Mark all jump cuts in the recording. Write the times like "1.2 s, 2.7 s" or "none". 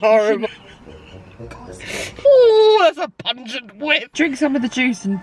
2.2 s, 4.1 s